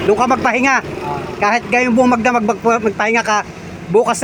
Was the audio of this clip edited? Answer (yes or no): no